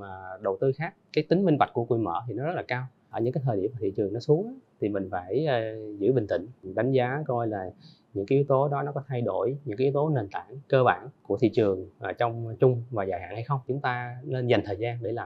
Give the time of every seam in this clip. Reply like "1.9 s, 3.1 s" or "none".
0.9 s, 3.1 s, 6.6 s, 11.1 s, 13.7 s